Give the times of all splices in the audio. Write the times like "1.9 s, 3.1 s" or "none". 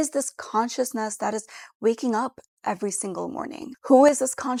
none